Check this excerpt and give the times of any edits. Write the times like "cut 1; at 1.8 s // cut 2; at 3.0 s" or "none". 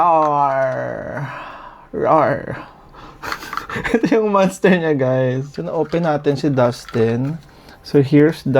cut 1; at 5.5 s